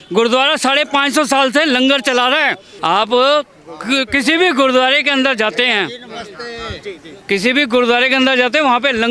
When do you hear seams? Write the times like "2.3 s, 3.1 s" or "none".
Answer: 2.7 s